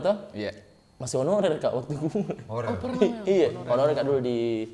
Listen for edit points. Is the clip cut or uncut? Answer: uncut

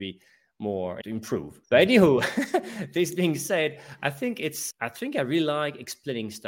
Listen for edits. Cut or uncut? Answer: cut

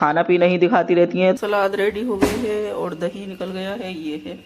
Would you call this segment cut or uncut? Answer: cut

